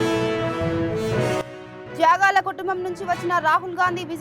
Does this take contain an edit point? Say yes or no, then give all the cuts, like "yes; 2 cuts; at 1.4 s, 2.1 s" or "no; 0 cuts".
no; 0 cuts